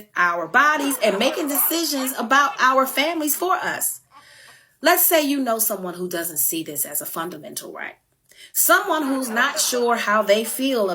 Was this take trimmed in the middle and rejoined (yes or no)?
yes